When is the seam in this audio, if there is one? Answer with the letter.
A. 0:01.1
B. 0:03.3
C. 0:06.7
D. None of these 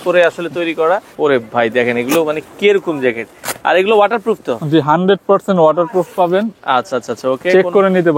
A